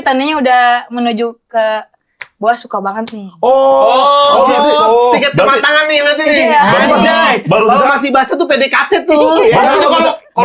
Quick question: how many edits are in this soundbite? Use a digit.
0